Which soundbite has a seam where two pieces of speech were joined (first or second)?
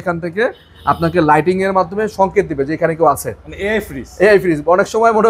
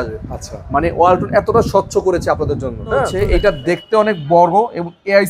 second